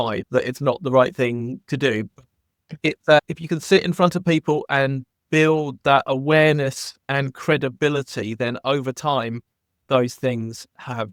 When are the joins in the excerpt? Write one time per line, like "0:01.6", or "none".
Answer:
none